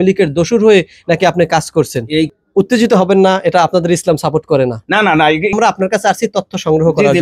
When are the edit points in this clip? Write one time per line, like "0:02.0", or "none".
0:02.3
0:05.5